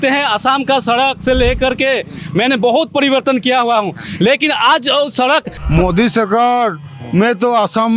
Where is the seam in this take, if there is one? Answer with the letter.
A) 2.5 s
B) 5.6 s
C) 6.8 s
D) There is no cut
B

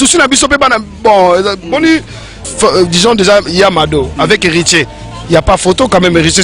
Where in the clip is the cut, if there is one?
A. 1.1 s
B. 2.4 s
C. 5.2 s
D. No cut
B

